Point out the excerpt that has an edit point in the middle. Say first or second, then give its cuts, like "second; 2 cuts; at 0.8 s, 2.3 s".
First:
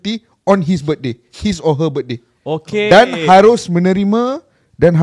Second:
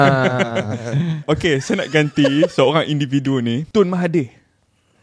second; 2 cuts; at 1.2 s, 3.6 s